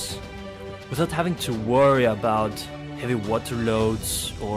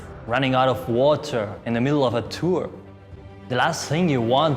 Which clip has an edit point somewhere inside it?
second; 1 cut; at 3.1 s

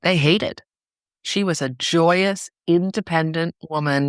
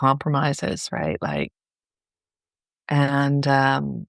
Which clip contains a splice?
first; 1 cut; at 1.2 s

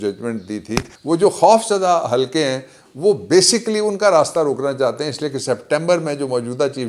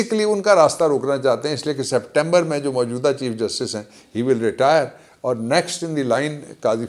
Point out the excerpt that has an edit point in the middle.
first; 1 cut; at 0.9 s

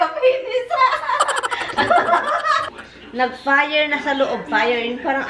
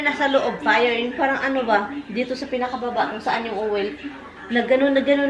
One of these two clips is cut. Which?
first; 1 cut; at 2.7 s

